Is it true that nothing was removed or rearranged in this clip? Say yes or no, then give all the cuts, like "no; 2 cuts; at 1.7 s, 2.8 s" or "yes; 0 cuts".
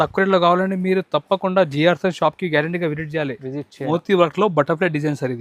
no; 1 cut; at 3.9 s